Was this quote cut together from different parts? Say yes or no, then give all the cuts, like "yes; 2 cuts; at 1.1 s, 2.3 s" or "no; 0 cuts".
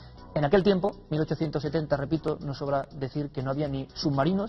yes; 1 cut; at 3.3 s